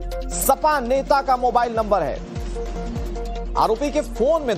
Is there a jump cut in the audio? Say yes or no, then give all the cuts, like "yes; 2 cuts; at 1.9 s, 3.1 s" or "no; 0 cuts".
yes; 1 cut; at 1.2 s